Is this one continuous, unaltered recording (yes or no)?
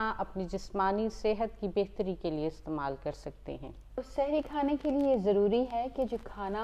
no